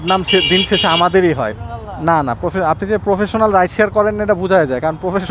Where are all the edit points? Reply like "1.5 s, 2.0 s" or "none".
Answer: 1.6 s